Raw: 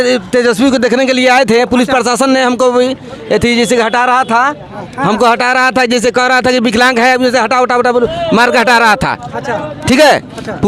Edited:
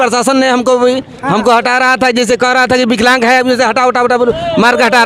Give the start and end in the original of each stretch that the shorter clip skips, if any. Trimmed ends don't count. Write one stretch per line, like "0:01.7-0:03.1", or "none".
0:03.1-0:04.9